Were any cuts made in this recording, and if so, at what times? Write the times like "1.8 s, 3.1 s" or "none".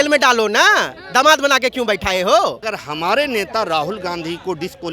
2.7 s